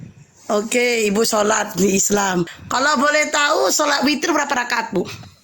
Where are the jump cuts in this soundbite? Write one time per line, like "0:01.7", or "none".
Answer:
0:02.6